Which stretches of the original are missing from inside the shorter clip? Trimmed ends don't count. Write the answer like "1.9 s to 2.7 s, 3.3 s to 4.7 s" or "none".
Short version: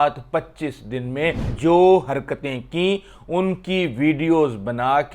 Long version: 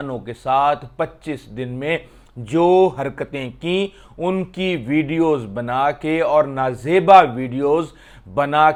2.1 s to 2.4 s

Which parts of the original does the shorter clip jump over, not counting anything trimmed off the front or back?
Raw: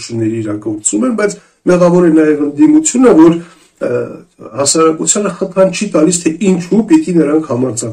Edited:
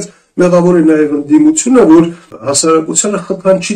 3.6 s to 4.4 s

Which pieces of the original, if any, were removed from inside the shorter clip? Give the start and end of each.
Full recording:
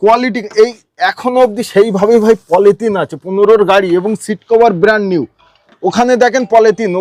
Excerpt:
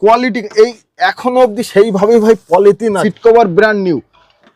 3.1 s to 4.3 s

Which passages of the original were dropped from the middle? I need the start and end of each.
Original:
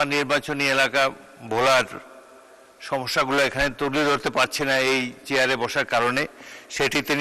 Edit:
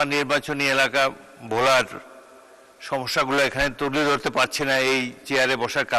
none

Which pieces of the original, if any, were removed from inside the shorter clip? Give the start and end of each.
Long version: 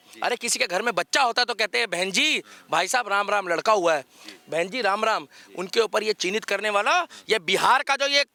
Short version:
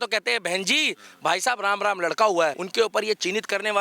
4.1 s to 5.6 s

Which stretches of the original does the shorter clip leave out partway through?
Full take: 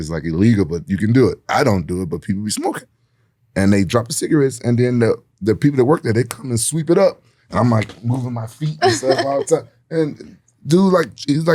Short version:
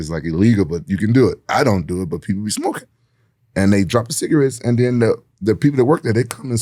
none

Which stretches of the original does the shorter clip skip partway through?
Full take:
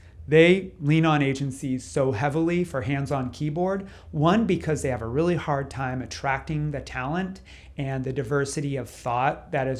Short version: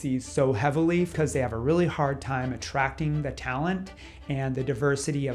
2.7 s to 4.6 s

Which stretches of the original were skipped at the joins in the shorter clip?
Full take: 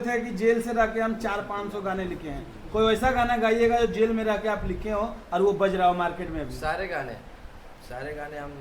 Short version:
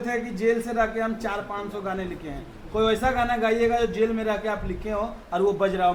none

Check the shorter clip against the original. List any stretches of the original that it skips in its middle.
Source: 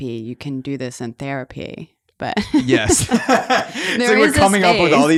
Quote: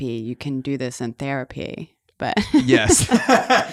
none

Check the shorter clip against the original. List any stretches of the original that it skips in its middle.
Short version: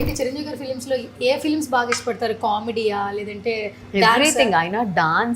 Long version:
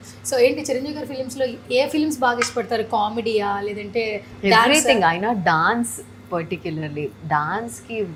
none

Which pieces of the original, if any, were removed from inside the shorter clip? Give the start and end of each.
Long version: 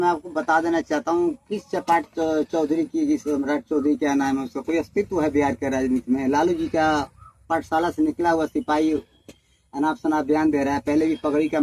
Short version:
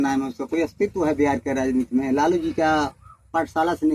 none

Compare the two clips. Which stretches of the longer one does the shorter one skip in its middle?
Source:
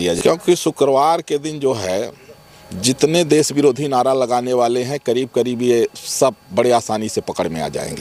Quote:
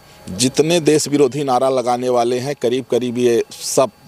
none

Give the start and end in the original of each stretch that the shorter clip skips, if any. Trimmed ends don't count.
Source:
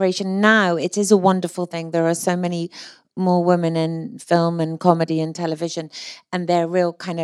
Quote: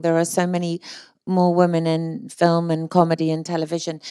none

